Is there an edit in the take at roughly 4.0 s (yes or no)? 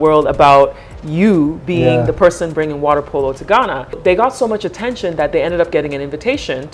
yes